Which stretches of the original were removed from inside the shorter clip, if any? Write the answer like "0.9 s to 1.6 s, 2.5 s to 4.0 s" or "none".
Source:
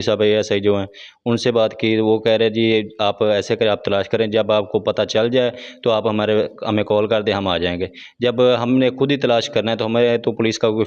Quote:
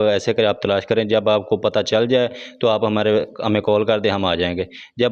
none